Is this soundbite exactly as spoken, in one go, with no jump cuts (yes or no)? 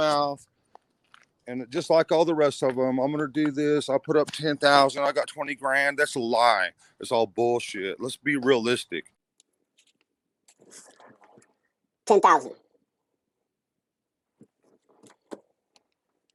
yes